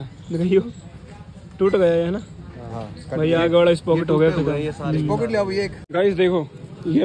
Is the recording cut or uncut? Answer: cut